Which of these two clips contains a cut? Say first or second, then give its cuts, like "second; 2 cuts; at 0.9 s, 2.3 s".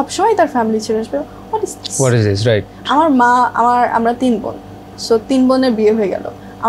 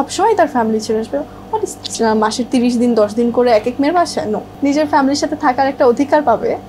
second; 2 cuts; at 1.8 s, 4.5 s